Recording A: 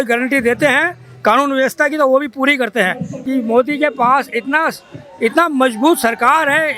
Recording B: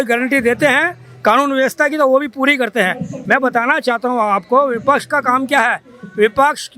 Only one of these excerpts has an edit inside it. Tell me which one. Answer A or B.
A